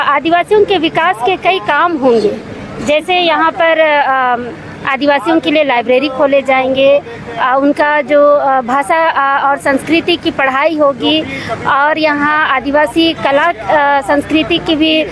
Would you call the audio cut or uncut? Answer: uncut